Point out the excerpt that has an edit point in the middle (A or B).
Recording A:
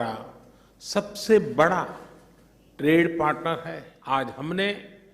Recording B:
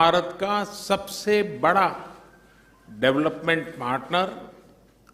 A